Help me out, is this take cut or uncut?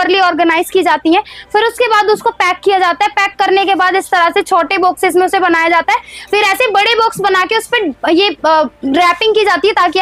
uncut